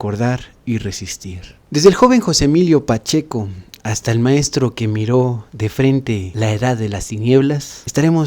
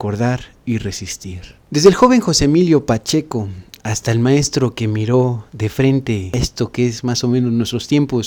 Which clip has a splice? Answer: first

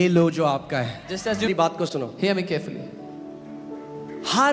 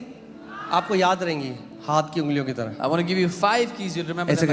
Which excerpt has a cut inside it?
first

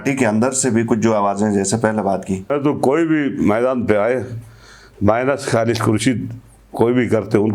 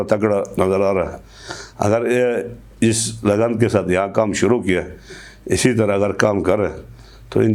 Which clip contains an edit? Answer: first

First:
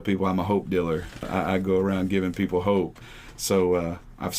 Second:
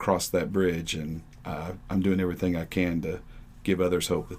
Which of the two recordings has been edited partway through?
first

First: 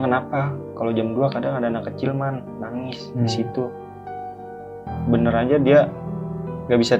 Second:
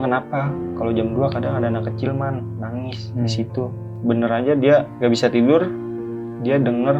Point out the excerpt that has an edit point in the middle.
second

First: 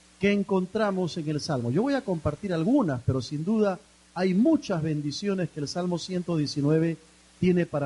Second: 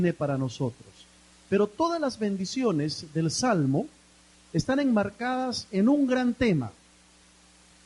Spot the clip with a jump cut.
second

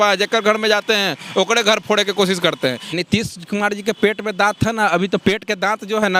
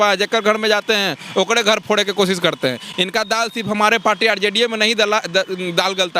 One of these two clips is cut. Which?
first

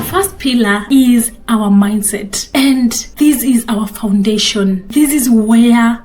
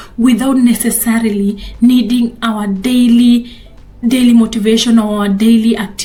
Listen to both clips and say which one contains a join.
first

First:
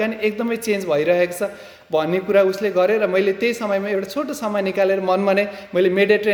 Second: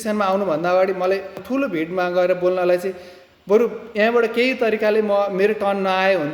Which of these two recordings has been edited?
second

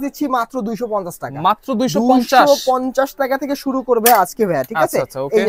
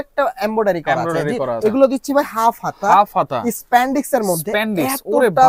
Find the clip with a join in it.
second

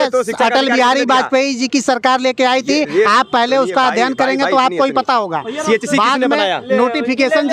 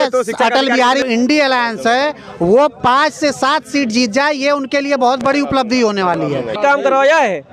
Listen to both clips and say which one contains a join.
second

